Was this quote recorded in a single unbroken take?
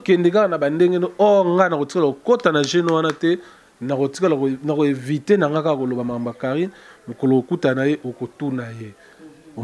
yes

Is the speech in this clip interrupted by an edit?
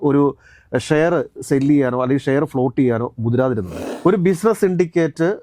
yes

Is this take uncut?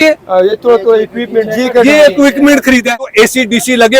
no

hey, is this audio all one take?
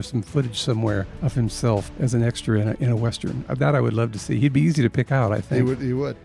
no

